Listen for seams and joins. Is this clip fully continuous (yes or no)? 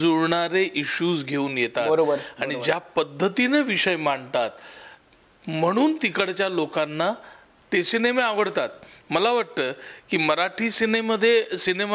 yes